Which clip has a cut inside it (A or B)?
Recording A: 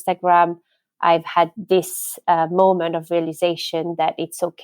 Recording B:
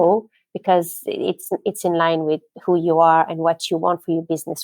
A